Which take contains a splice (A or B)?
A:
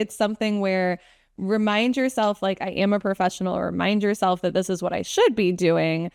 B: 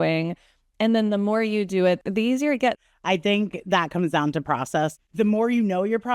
B